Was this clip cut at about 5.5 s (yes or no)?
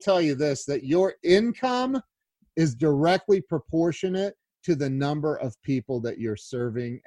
no